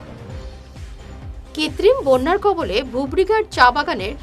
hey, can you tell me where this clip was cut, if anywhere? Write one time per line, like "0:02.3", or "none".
0:01.4